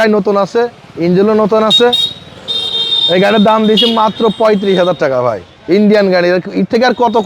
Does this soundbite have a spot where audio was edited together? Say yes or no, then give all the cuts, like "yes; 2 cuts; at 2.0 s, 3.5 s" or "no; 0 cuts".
no; 0 cuts